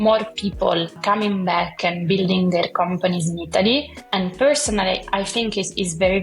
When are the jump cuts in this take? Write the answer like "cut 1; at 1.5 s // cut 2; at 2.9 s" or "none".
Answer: cut 1; at 0.9 s // cut 2; at 4.0 s